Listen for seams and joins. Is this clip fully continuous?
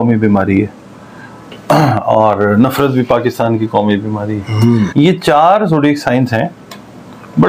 no; 1 cut; at 4.9 s

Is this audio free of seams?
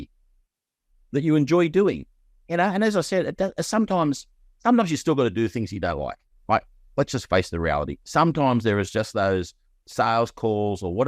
yes; 0 cuts

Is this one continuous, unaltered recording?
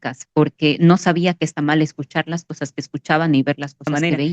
yes; 0 cuts

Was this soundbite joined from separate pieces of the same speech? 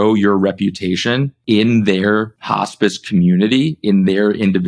yes; 2 cuts; at 1.3 s, 2.4 s

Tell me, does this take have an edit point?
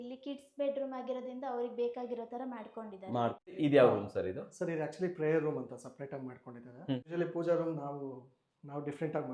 yes; 1 cut; at 3.3 s

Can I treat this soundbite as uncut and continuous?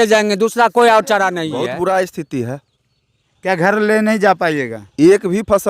no; 1 cut; at 1.5 s

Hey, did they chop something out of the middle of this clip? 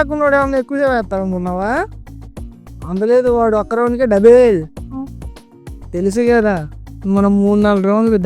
no; 0 cuts

